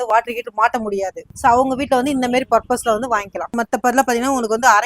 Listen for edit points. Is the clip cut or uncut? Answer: cut